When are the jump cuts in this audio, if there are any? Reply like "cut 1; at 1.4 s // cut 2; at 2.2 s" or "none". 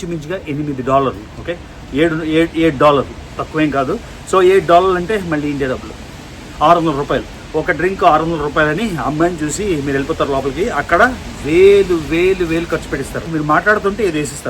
cut 1; at 13.3 s

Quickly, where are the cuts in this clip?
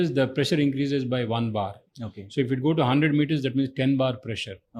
none

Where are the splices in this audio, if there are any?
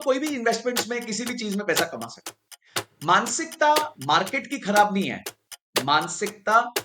none

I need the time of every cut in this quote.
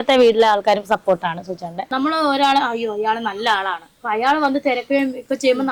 cut 1; at 1.9 s

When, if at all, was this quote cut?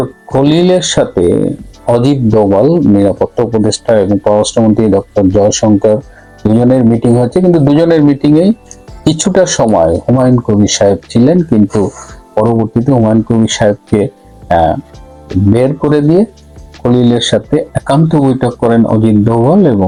none

